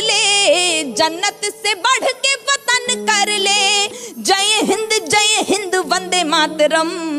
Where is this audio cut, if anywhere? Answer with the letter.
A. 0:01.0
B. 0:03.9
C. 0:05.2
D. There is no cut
B